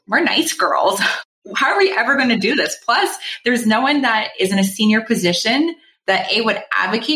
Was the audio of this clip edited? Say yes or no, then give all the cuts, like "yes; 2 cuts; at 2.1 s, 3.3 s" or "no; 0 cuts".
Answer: yes; 1 cut; at 1.1 s